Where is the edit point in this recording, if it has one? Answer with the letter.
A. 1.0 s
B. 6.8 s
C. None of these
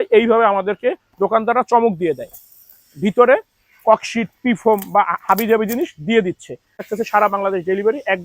B